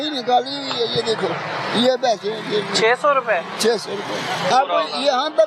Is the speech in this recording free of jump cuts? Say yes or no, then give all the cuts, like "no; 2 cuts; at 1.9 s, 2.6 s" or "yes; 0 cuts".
no; 1 cut; at 4.5 s